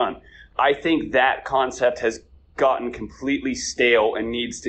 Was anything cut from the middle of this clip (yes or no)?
no